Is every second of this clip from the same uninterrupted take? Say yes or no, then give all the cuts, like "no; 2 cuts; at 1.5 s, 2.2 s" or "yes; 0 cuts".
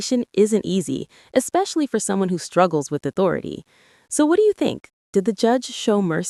yes; 0 cuts